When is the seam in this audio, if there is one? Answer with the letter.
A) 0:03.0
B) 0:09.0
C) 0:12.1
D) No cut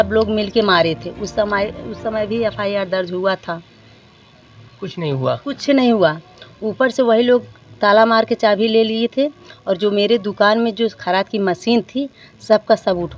D